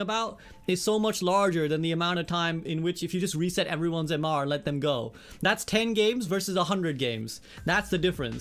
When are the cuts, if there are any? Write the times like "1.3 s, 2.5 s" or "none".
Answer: none